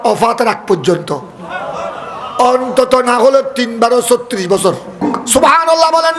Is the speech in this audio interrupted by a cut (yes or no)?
yes